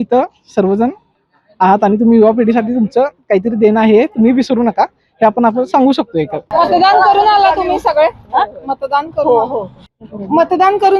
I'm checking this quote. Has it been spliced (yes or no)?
no